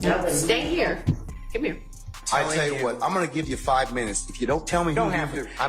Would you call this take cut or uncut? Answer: cut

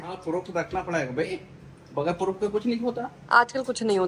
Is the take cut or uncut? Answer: uncut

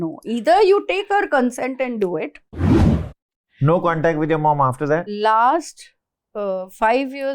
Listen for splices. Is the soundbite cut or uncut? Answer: cut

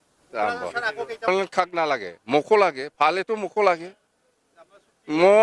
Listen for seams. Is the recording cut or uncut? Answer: cut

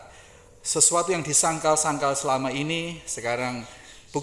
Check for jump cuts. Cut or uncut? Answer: uncut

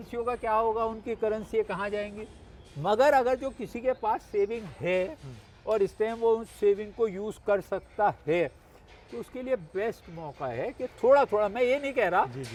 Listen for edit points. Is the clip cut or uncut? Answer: uncut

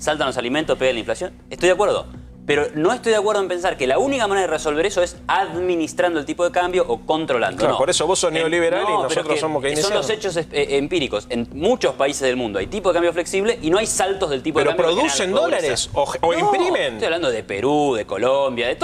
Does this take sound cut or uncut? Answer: uncut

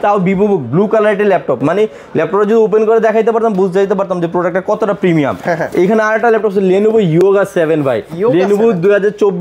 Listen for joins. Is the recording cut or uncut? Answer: uncut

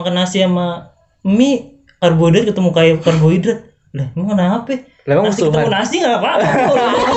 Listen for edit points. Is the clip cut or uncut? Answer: uncut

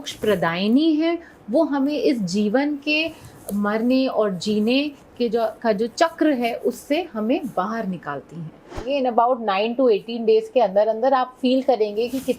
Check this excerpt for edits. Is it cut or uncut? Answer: cut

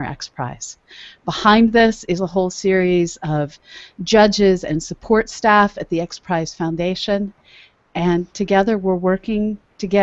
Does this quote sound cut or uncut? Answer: cut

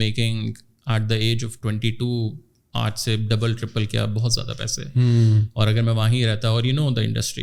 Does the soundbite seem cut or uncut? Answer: uncut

